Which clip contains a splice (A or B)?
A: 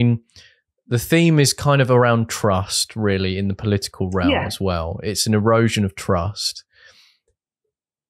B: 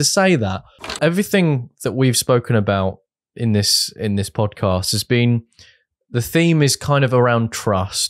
B